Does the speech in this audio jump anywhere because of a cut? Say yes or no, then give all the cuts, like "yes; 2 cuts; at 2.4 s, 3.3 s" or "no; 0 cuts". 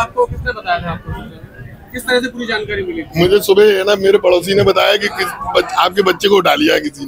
no; 0 cuts